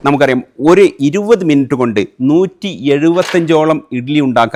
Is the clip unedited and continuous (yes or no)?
yes